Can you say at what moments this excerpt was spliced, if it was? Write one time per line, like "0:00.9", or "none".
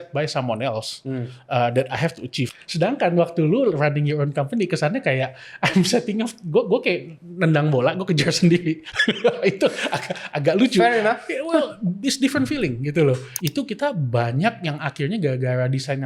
0:02.5
0:13.3